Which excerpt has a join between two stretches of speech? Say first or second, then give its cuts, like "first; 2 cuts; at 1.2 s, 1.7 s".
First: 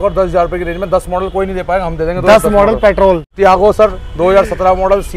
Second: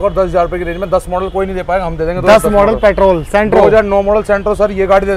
first; 1 cut; at 3.3 s